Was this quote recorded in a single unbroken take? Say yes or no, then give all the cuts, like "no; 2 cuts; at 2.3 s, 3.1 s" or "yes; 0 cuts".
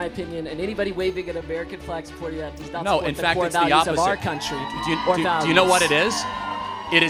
yes; 0 cuts